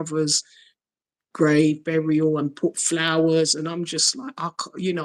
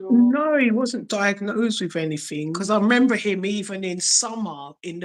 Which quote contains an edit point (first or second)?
second